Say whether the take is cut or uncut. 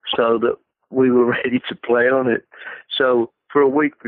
uncut